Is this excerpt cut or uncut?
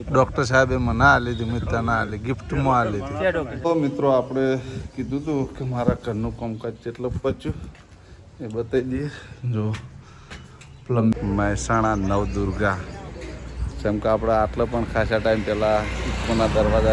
cut